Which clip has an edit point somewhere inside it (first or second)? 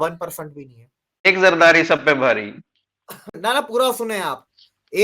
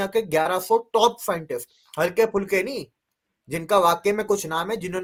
first